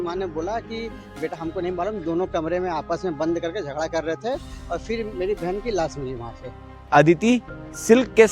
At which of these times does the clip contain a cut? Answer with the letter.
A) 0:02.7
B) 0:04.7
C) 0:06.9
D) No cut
C